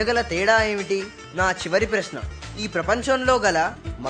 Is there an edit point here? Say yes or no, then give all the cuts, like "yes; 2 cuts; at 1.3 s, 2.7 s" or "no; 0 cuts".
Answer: yes; 1 cut; at 1.2 s